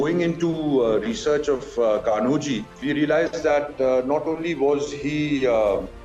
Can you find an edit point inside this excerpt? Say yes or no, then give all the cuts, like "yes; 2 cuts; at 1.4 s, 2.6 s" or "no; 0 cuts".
no; 0 cuts